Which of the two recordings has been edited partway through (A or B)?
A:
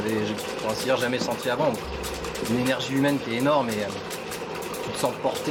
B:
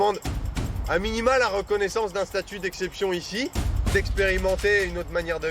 B